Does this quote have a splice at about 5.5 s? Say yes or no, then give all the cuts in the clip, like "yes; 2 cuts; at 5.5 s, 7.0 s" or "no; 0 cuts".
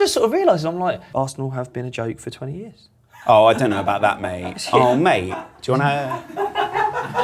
no; 1 cut; at 1.0 s